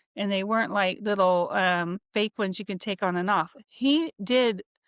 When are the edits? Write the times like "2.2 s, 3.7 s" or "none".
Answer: 3.6 s

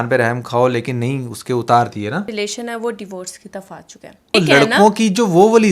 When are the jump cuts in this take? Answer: 2.3 s, 4.2 s

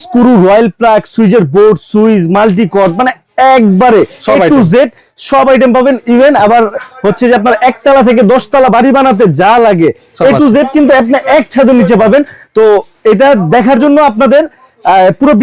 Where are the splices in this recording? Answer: none

